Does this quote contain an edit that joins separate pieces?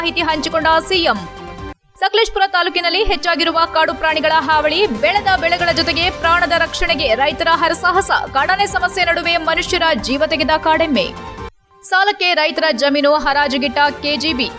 no; 0 cuts

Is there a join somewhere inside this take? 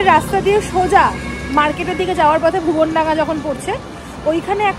no; 0 cuts

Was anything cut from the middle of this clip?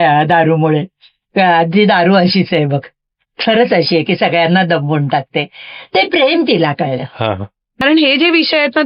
yes; 1 cut; at 7.6 s

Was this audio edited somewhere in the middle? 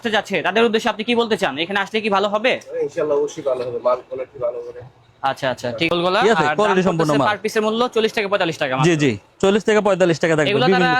yes; 1 cut; at 5.9 s

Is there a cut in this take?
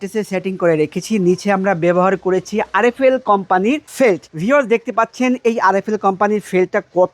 no; 0 cuts

